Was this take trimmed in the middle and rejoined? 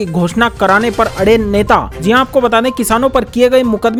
no; 0 cuts

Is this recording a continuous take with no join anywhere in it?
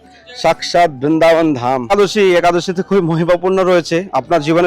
no; 1 cut; at 1.9 s

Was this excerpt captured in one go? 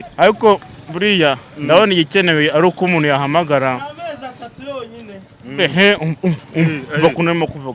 yes; 0 cuts

